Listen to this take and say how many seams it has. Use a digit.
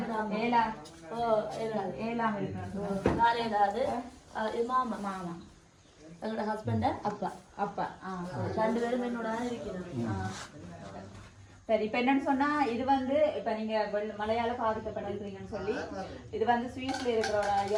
0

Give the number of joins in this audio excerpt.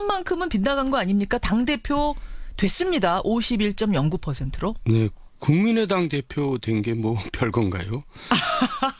0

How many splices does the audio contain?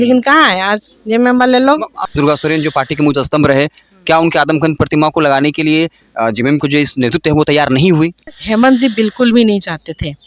2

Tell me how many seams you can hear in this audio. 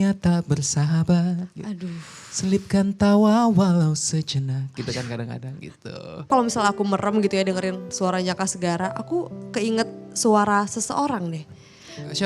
1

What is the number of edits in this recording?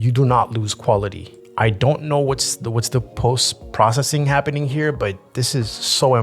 0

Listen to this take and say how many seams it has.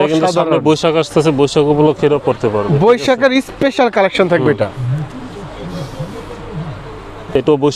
0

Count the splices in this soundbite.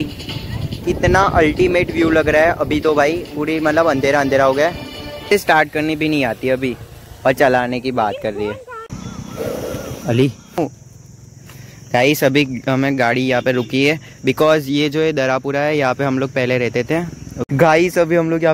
3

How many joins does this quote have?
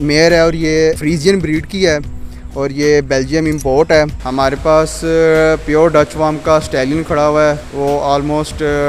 2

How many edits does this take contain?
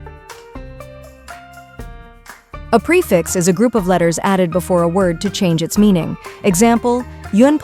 1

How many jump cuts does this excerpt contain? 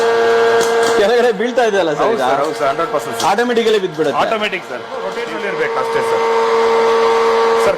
1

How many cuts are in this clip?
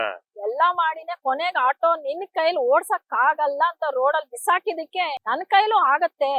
1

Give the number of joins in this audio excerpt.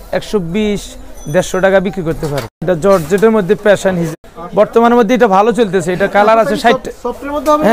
2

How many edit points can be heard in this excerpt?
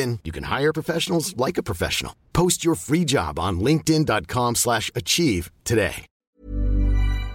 1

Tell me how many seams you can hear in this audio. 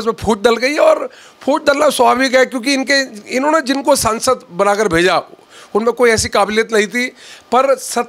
0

